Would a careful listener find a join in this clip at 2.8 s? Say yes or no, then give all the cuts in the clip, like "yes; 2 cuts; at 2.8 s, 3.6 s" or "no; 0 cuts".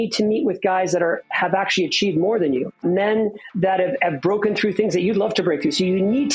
yes; 1 cut; at 2.8 s